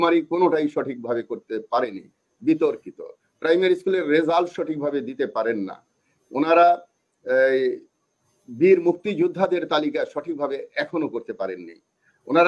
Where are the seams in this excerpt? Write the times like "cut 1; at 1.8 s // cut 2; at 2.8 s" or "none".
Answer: none